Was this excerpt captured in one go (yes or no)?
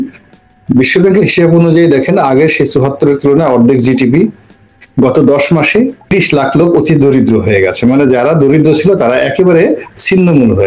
no